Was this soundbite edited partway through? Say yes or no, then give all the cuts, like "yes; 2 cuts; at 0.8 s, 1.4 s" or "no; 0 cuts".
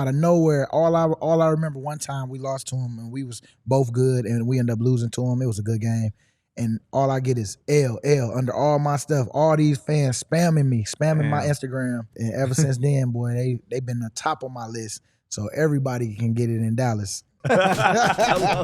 yes; 2 cuts; at 12.1 s, 17.3 s